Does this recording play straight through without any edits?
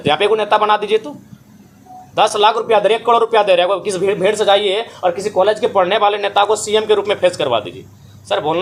yes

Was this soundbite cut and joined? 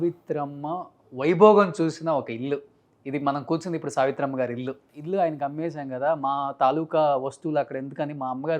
yes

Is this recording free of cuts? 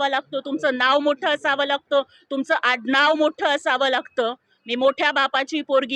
yes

